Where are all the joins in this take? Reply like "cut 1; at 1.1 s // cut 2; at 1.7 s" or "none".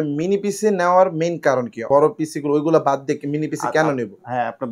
cut 1; at 1.8 s